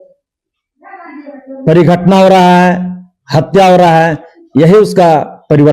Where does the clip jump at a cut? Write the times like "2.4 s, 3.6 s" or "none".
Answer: none